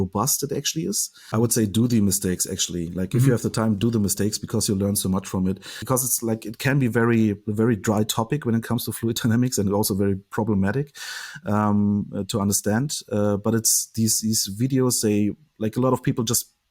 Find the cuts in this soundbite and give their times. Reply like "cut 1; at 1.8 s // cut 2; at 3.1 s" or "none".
cut 1; at 1.1 s // cut 2; at 5.7 s